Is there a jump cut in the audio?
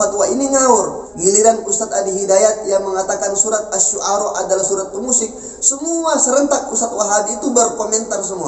yes; 1 cut; at 1.0 s

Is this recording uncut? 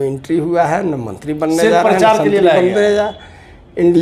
yes; 0 cuts

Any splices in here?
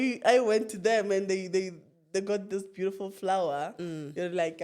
no; 0 cuts

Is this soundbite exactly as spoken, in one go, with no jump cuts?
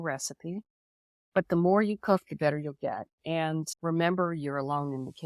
no; 1 cut; at 3.7 s

